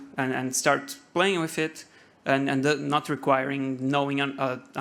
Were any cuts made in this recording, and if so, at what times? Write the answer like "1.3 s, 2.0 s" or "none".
none